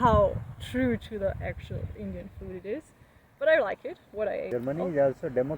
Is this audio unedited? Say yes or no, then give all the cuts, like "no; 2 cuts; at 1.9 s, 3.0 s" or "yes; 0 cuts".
no; 1 cut; at 4.5 s